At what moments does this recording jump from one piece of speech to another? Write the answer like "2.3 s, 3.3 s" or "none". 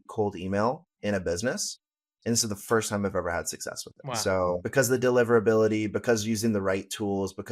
4.6 s